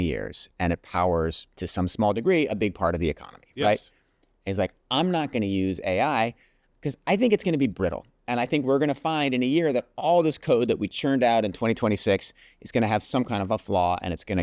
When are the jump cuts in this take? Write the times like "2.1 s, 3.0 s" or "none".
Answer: 1.5 s